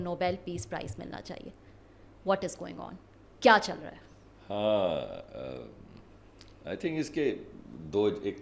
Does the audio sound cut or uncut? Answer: uncut